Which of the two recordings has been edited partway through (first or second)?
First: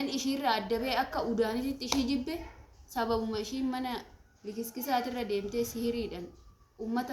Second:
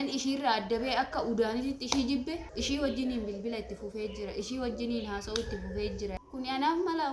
second